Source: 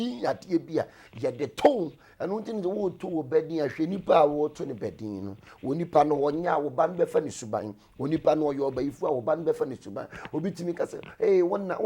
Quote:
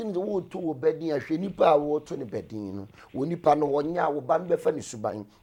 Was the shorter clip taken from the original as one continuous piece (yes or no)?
yes